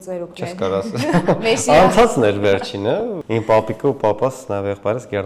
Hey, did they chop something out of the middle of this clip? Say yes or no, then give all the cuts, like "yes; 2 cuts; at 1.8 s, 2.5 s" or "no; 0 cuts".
yes; 1 cut; at 3.2 s